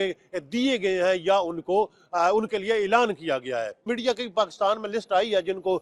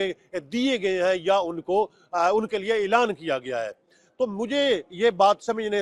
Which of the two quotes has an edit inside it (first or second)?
first